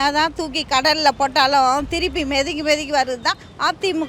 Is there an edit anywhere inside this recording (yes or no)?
no